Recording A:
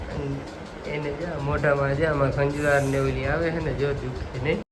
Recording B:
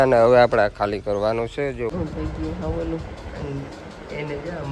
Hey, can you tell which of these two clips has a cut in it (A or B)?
B